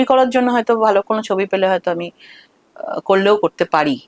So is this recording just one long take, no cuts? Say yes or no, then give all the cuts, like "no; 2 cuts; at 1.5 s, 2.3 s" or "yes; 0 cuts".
yes; 0 cuts